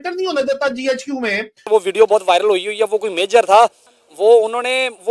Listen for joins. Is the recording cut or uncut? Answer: cut